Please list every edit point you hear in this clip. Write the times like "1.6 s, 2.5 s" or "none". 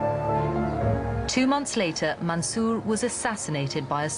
2.8 s